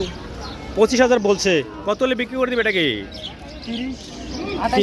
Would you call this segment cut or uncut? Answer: uncut